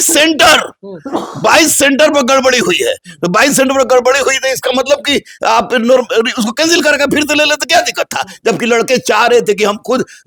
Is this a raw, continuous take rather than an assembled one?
yes; 0 cuts

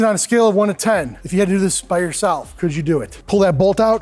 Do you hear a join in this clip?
yes; 2 cuts; at 1.2 s, 3.1 s

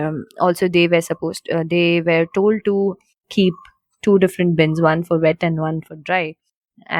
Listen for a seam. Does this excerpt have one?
no; 0 cuts

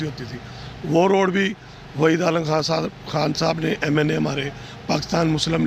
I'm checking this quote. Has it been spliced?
no; 0 cuts

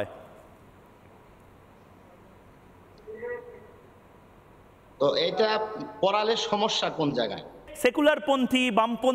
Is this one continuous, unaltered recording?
no; 1 cut; at 7.6 s

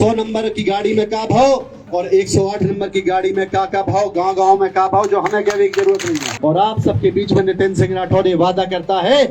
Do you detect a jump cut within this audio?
yes; 1 cut; at 6.3 s

